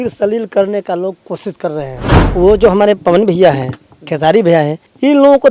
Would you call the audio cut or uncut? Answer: cut